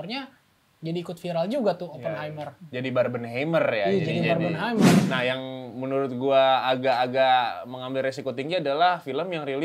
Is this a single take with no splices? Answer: no; 1 cut; at 5.0 s

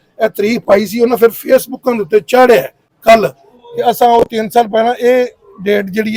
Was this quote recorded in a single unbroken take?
yes; 0 cuts

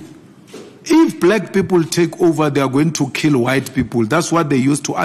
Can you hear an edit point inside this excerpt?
no; 0 cuts

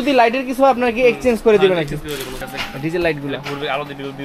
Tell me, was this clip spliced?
yes; 1 cut; at 2.4 s

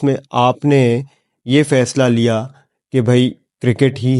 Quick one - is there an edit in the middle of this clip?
no; 0 cuts

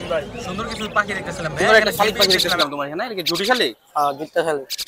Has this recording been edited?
yes; 1 cut; at 1.6 s

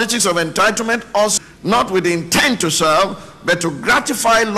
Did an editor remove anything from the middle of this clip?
yes; 1 cut; at 1.3 s

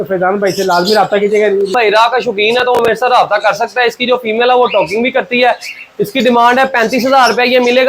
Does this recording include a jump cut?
yes; 1 cut; at 1.7 s

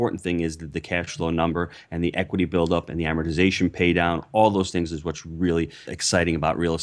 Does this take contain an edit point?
yes; 1 cut; at 5.9 s

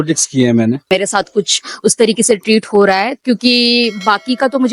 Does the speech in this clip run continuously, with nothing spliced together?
no; 2 cuts; at 0.8 s, 3.1 s

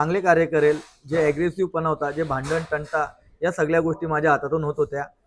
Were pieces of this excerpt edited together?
no; 0 cuts

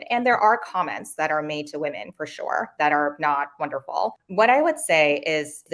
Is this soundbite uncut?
no; 1 cut; at 4.1 s

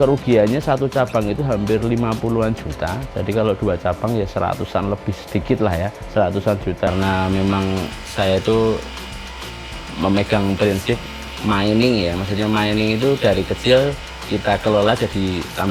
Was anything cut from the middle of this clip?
yes; 1 cut; at 6.9 s

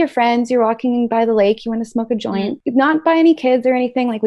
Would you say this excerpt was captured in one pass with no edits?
yes; 0 cuts

